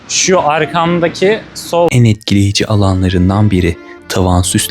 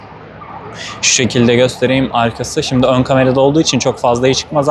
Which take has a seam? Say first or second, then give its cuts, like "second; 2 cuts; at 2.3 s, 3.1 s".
first; 1 cut; at 1.9 s